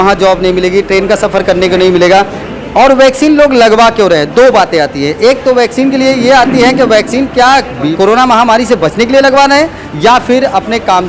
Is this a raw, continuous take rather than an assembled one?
no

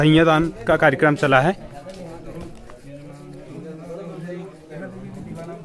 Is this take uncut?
yes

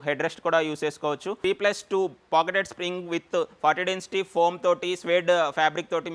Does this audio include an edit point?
yes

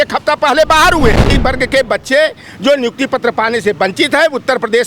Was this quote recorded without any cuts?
no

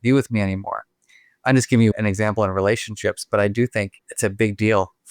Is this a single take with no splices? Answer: no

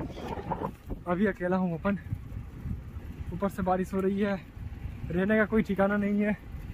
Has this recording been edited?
no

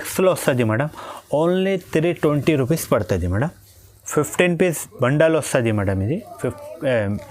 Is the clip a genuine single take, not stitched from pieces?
yes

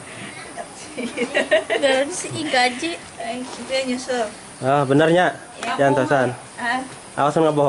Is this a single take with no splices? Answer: yes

